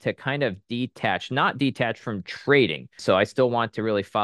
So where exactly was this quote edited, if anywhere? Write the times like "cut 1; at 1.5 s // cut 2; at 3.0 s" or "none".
cut 1; at 3.0 s